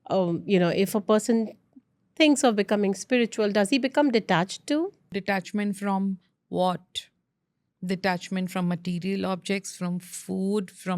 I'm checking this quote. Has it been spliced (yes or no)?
yes